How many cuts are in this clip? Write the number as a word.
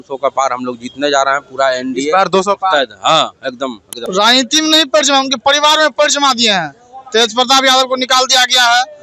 one